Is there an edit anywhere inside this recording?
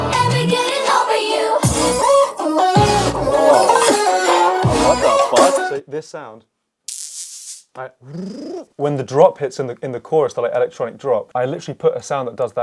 yes; 3 cuts; at 5.7 s, 8.7 s, 11.3 s

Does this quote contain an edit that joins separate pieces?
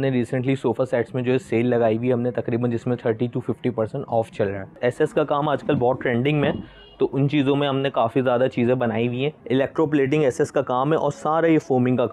yes; 2 cuts; at 4.8 s, 9.4 s

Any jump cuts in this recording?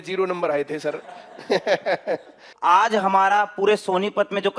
yes; 1 cut; at 2.5 s

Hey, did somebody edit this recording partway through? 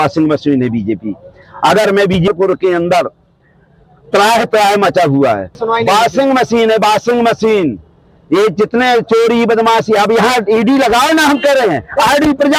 yes; 2 cuts; at 2.3 s, 5.5 s

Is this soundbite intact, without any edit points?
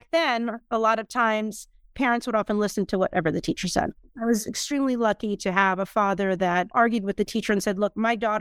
no; 2 cuts; at 4.1 s, 6.7 s

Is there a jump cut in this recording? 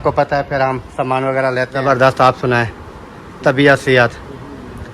yes; 1 cut; at 1.8 s

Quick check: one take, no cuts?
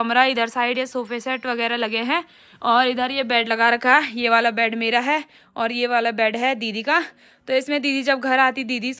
yes; 0 cuts

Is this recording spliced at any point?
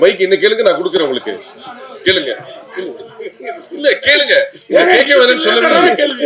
no; 0 cuts

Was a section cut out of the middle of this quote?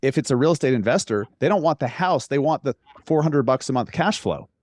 no; 0 cuts

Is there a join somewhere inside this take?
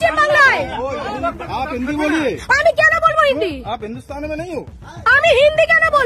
yes; 1 cut; at 1.4 s

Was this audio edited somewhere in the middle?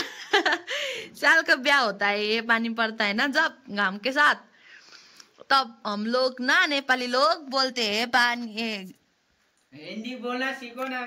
no; 0 cuts

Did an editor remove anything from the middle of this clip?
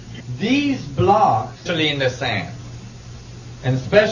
no; 0 cuts

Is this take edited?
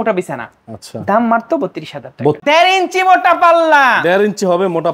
yes; 1 cut; at 2.4 s

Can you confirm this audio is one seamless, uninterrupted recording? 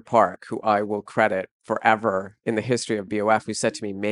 no; 1 cut; at 2.3 s

